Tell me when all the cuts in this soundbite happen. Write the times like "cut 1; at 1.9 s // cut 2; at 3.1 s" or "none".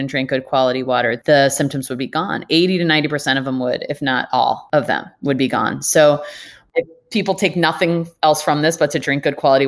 cut 1; at 1.2 s // cut 2; at 4.6 s // cut 3; at 6.6 s